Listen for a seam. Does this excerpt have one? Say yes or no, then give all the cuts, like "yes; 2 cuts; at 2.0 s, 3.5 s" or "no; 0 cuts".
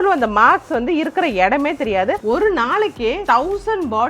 yes; 2 cuts; at 2.2 s, 3.2 s